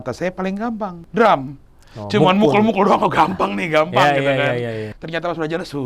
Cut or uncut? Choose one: cut